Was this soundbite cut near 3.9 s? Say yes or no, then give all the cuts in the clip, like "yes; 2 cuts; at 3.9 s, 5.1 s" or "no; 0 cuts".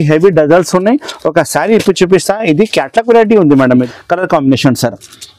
yes; 1 cut; at 3.9 s